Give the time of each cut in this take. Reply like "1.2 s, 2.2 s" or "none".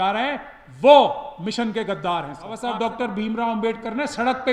2.6 s